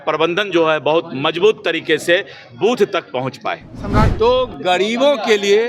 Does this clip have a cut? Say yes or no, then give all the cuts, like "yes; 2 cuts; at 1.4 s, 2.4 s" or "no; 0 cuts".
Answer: yes; 1 cut; at 4.1 s